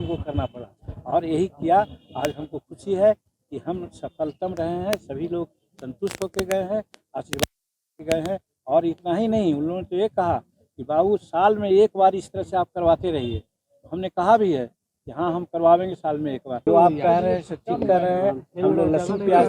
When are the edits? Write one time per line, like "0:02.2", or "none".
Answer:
0:16.6